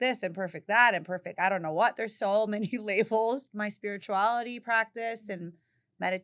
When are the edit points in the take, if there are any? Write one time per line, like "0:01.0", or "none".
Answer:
0:03.5